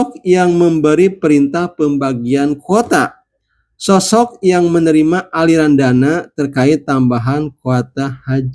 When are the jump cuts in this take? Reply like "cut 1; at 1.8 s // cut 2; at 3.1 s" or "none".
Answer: none

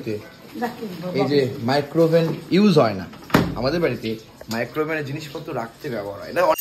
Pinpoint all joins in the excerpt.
none

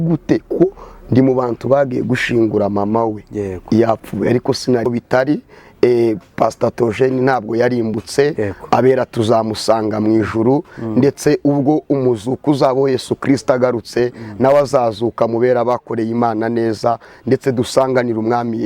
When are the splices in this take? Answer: cut 1; at 4.9 s

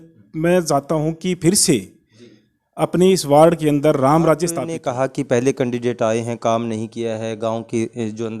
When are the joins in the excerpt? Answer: cut 1; at 4.7 s

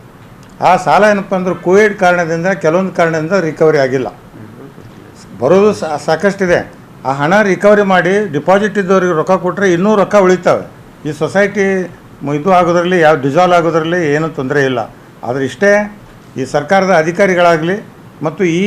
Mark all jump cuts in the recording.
none

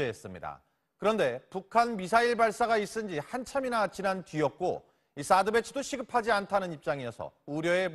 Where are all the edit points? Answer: cut 1; at 1.8 s

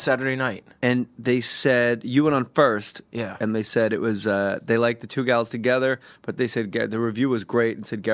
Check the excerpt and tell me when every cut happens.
cut 1; at 4.1 s

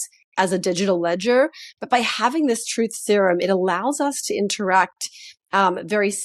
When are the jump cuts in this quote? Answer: none

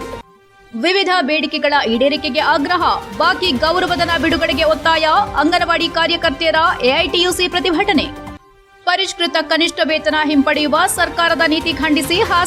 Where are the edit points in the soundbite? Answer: none

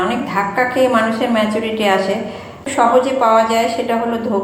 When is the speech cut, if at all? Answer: cut 1; at 2.6 s

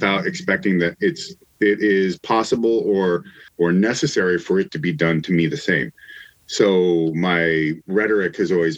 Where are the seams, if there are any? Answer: cut 1; at 3.4 s

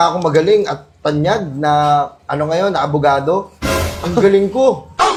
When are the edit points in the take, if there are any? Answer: none

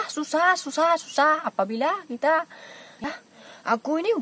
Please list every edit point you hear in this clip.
cut 1; at 3.1 s

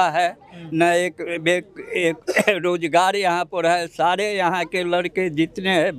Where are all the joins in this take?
none

